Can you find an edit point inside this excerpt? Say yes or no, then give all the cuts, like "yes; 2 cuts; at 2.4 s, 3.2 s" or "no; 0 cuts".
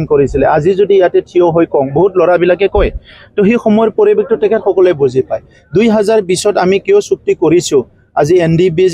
no; 0 cuts